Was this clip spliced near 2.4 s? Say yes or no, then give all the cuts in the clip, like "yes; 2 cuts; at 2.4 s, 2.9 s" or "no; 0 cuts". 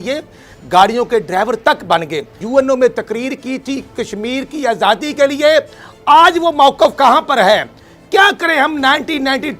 yes; 1 cut; at 2.4 s